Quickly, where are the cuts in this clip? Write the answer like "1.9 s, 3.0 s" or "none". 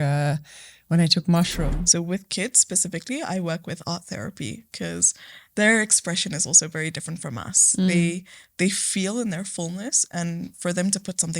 1.6 s